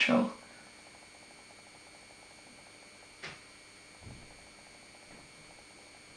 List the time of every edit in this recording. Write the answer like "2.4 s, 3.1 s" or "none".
none